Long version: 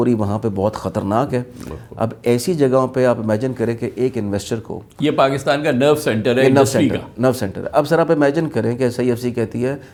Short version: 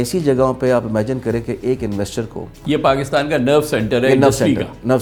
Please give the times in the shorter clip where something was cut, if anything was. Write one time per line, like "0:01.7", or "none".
none